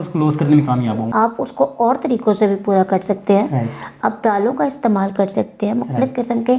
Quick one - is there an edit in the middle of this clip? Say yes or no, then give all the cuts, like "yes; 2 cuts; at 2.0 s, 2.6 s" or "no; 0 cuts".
yes; 1 cut; at 1.0 s